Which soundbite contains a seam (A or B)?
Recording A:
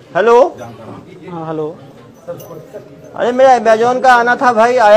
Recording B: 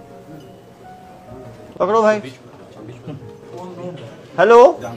B